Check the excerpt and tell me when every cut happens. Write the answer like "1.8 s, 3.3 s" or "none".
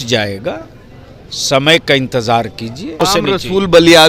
3.0 s